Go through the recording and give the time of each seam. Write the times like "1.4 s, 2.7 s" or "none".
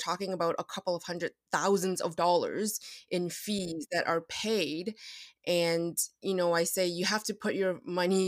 none